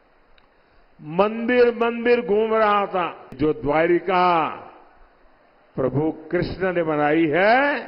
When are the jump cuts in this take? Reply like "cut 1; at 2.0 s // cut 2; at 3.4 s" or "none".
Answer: cut 1; at 3.4 s